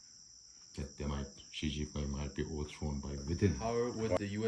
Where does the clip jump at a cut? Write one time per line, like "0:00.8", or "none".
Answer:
0:03.6